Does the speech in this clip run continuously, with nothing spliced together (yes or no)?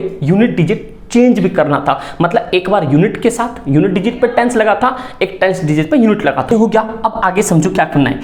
yes